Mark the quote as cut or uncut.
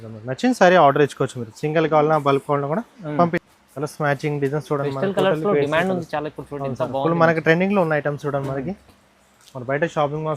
cut